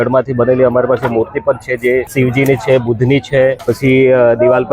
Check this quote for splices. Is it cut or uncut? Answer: cut